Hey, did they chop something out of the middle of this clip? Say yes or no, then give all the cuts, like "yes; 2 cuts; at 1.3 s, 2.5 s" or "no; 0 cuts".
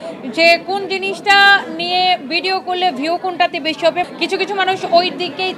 yes; 1 cut; at 4.1 s